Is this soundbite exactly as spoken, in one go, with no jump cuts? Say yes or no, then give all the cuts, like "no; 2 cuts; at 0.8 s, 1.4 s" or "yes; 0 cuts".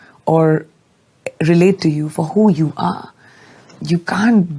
yes; 0 cuts